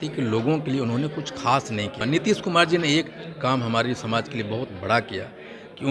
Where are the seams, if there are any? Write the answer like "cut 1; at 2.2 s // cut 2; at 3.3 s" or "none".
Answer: cut 1; at 2.0 s